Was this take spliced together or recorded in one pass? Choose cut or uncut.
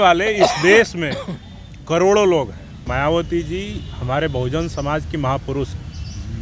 cut